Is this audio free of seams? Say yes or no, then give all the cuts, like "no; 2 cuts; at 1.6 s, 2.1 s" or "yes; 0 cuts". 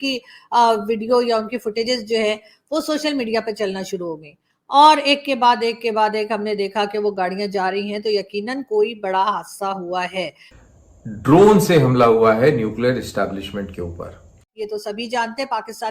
no; 2 cuts; at 10.6 s, 14.5 s